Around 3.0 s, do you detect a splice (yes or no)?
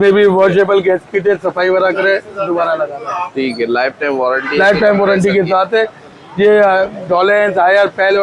no